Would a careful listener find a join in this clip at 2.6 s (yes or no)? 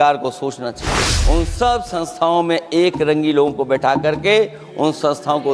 no